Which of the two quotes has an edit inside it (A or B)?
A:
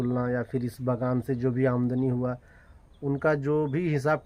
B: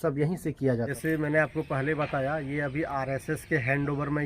B